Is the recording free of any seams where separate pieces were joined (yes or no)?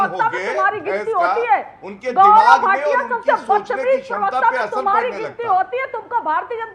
yes